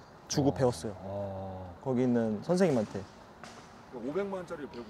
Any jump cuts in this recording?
no; 0 cuts

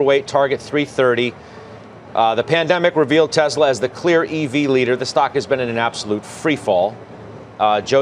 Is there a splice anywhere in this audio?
no; 0 cuts

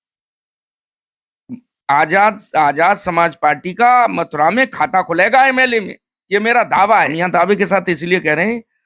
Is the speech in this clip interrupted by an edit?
yes; 1 cut; at 7.1 s

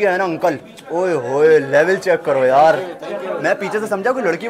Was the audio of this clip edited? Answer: no; 0 cuts

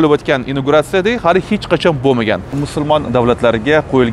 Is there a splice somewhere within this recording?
yes; 1 cut; at 2.6 s

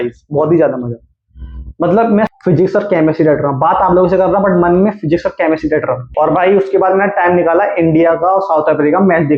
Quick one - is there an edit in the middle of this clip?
yes; 2 cuts; at 2.3 s, 6.1 s

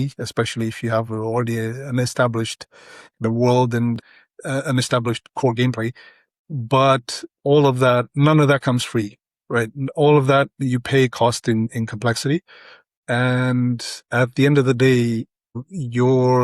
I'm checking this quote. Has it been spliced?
yes; 5 cuts; at 4.0 s, 6.3 s, 12.9 s, 13.9 s, 15.5 s

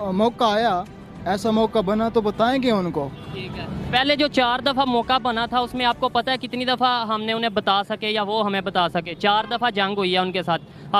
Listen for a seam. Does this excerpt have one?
no; 0 cuts

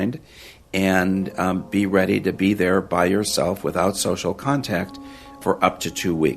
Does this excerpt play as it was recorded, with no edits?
no; 1 cut; at 5.4 s

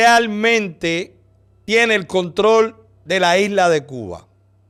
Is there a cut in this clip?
no; 0 cuts

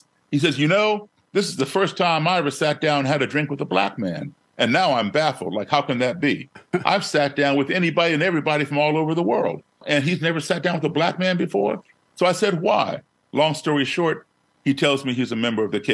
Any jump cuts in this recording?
yes; 2 cuts; at 1.2 s, 9.8 s

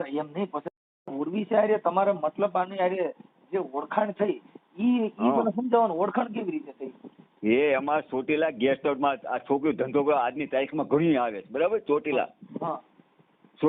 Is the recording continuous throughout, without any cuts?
no; 1 cut; at 1.1 s

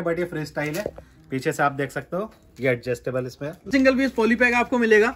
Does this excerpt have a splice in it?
yes; 1 cut; at 3.7 s

